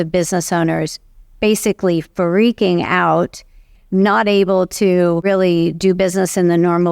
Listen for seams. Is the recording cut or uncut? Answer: cut